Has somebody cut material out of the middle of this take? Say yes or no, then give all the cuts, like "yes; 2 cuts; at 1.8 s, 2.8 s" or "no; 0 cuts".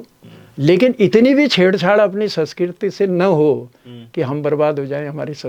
no; 0 cuts